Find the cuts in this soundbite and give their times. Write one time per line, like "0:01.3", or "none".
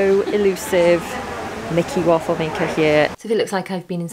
0:03.1